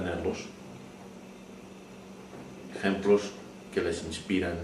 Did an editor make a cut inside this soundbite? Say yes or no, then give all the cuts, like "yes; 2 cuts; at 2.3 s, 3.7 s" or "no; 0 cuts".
yes; 1 cut; at 2.2 s